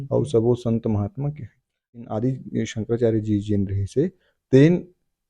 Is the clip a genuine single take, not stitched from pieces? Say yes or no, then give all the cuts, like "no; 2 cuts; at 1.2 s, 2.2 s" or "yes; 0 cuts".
no; 1 cut; at 2.0 s